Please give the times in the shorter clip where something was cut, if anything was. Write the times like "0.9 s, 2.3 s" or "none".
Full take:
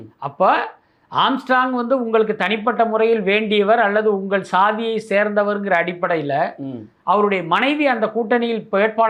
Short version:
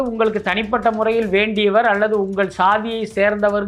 none